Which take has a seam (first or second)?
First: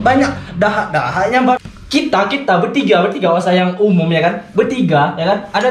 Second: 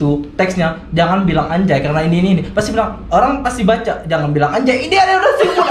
first